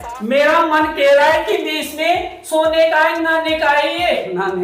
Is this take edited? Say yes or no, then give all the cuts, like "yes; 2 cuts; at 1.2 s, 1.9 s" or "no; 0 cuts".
no; 0 cuts